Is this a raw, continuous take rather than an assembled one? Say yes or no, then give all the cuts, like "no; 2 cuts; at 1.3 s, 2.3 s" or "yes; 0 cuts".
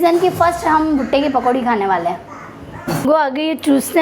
no; 1 cut; at 3.0 s